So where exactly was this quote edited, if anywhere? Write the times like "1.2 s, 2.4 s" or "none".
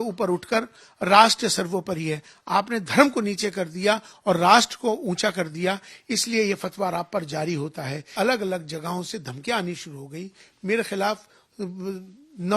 8.1 s